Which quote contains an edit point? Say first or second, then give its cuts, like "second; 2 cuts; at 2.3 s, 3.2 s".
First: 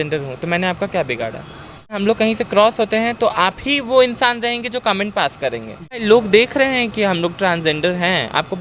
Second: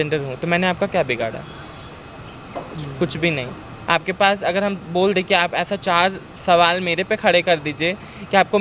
first; 2 cuts; at 2.0 s, 6.0 s